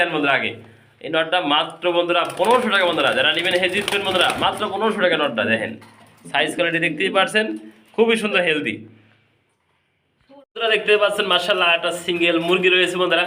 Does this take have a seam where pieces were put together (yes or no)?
no